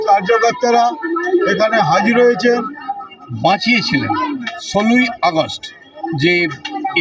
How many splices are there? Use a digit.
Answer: 1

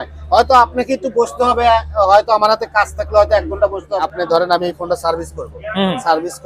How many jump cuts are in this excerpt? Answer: 1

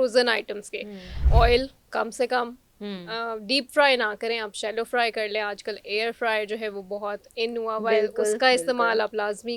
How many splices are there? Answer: 1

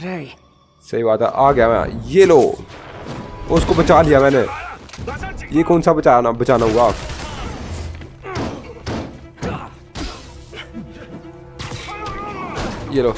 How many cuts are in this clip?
0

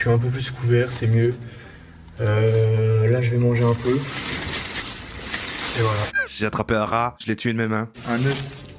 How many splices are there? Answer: 0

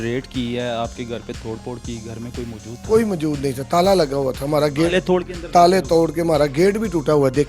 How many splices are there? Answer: 0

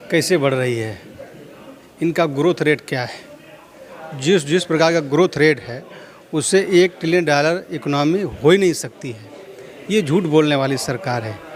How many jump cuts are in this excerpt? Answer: 0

